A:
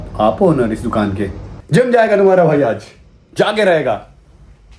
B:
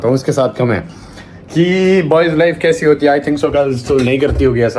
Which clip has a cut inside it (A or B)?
A